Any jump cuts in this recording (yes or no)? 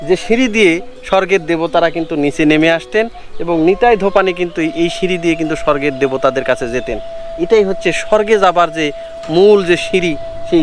no